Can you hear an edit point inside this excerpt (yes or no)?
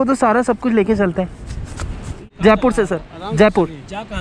yes